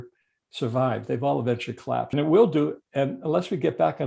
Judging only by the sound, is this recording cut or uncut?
cut